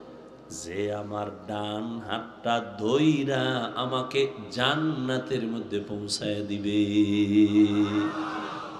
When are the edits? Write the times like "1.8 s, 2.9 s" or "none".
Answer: none